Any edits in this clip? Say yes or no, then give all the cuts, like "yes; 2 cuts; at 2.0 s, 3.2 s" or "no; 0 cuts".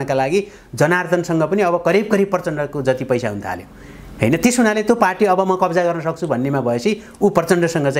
no; 0 cuts